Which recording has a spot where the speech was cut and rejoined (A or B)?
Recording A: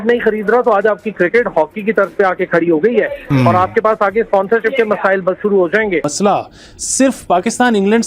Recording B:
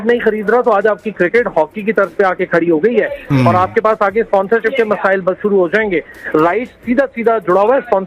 A